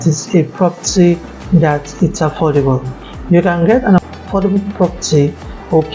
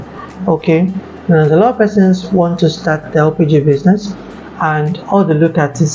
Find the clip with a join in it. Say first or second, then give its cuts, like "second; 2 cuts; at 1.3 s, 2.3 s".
first; 1 cut; at 4.1 s